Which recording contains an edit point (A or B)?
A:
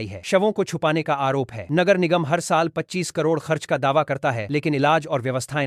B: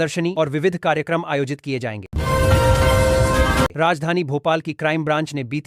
B